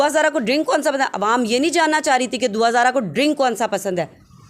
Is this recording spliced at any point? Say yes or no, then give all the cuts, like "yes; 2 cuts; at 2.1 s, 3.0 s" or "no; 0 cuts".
no; 0 cuts